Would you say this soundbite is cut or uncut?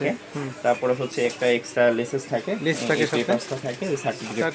uncut